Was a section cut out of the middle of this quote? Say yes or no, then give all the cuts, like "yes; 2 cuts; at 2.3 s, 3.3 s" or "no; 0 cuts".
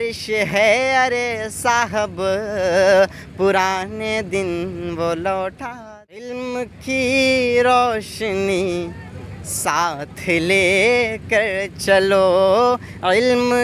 yes; 1 cut; at 5.7 s